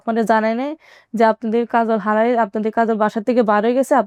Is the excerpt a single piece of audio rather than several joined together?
yes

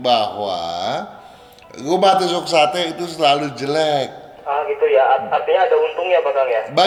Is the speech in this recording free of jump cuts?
yes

